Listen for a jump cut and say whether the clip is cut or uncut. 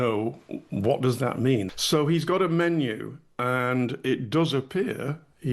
cut